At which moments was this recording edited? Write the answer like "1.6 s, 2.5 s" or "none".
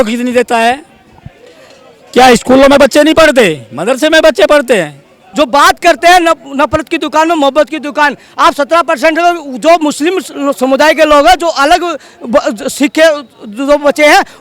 5.2 s